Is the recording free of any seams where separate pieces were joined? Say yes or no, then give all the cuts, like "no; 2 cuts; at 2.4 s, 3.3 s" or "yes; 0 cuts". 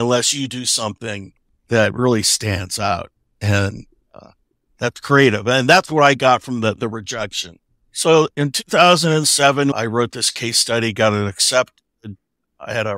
no; 1 cut; at 9.7 s